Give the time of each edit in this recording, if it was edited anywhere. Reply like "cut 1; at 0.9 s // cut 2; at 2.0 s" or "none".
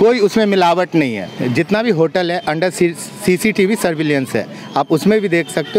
cut 1; at 1.3 s